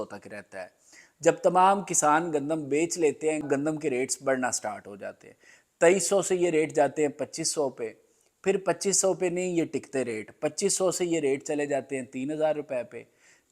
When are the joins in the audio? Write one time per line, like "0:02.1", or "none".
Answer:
0:03.5